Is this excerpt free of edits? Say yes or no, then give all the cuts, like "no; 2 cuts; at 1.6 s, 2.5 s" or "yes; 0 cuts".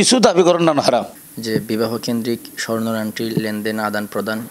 yes; 0 cuts